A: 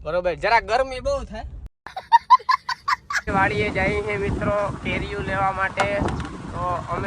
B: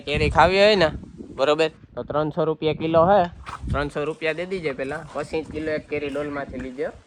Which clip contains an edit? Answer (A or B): A